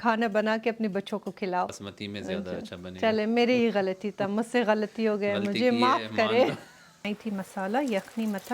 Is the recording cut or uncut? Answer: cut